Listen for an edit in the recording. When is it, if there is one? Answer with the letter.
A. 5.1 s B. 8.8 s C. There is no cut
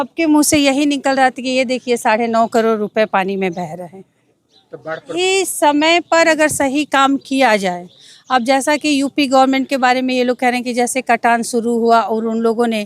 A